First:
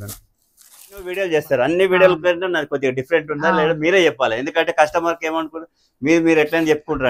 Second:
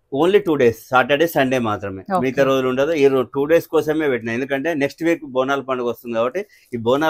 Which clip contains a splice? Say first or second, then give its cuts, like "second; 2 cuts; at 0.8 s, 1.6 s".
first; 1 cut; at 1.2 s